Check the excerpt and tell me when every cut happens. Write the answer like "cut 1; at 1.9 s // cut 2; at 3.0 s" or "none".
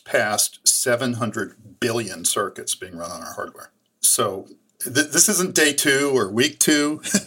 cut 1; at 4.7 s